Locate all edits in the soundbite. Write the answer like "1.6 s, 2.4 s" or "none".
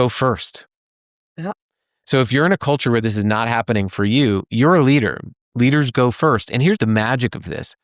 6.8 s